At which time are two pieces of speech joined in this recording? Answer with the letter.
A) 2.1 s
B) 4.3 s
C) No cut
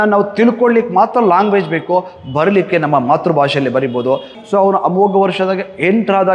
B